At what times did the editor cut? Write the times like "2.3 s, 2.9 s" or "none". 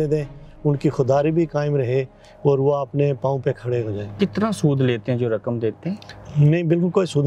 none